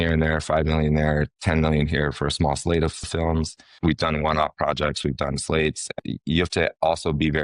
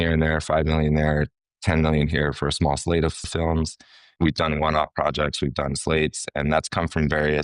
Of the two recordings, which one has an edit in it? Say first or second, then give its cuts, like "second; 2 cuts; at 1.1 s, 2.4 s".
first; 3 cuts; at 1.4 s, 3.6 s, 5.9 s